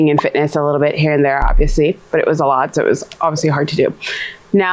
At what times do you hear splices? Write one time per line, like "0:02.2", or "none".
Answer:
none